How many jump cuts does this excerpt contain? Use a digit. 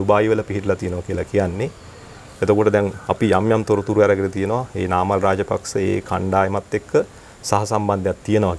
0